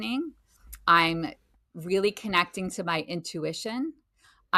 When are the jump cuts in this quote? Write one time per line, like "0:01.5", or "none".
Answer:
none